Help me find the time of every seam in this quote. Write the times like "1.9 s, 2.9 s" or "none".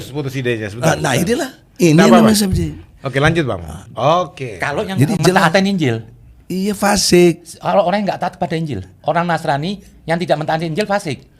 3.9 s